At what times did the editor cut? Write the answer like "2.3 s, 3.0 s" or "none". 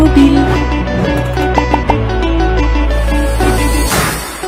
none